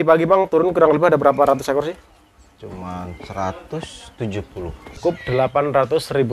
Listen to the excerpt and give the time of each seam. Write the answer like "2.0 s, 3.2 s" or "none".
5.0 s